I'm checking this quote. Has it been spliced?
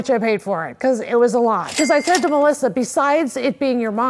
no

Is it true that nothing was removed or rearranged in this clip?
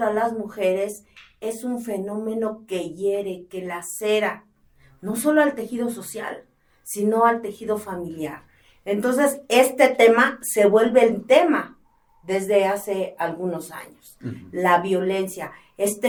yes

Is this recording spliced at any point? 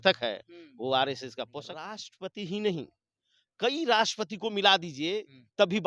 yes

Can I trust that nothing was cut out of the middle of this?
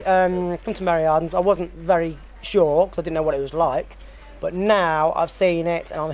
yes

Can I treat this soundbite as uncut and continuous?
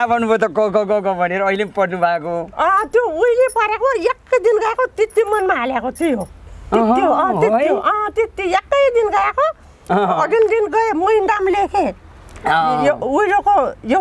yes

